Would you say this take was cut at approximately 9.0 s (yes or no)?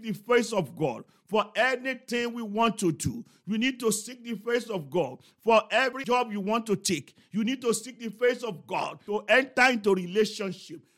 yes